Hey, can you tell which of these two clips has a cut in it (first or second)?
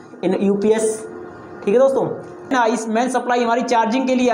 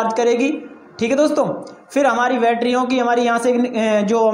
first